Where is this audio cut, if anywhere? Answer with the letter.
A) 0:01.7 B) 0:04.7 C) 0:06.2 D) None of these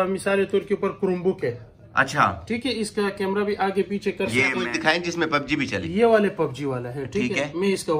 B